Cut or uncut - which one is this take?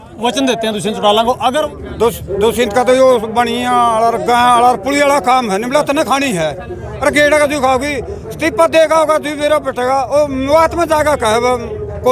cut